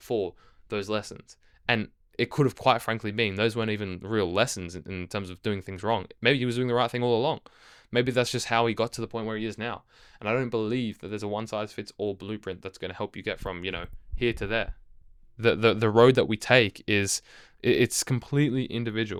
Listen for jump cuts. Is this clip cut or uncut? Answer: uncut